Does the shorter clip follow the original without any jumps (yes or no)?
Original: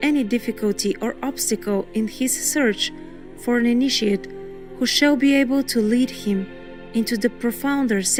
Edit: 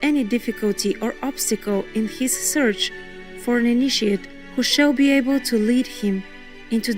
no